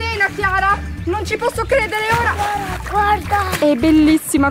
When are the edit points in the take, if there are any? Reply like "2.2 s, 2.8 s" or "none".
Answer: 2.8 s